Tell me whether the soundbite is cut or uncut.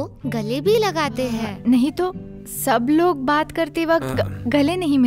cut